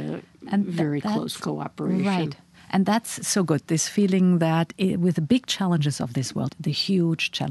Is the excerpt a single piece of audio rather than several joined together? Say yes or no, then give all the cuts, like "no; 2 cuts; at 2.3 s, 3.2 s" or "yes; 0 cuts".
no; 1 cut; at 6.5 s